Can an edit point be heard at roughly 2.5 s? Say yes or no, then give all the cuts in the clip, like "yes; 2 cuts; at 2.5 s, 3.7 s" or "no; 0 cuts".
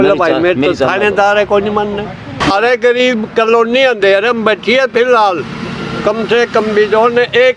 yes; 1 cut; at 2.5 s